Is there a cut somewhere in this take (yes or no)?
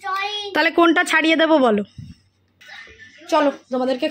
yes